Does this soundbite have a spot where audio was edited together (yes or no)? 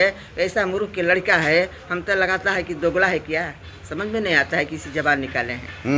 no